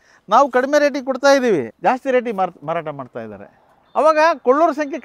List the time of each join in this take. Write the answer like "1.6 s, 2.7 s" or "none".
1.7 s